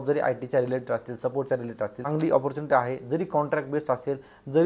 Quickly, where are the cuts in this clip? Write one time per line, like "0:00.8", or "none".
0:02.0